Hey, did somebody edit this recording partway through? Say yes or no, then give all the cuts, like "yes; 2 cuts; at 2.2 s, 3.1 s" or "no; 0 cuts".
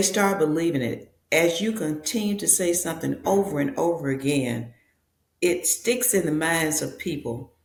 no; 0 cuts